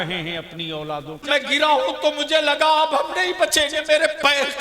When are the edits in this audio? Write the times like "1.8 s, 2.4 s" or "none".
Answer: 1.2 s

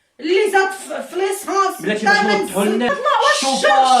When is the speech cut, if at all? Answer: 2.9 s

